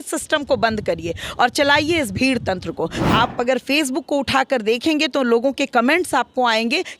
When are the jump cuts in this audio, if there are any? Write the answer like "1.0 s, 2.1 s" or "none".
3.0 s